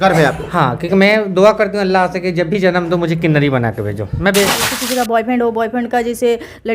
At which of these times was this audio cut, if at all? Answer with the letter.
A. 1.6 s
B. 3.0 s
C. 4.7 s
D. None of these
C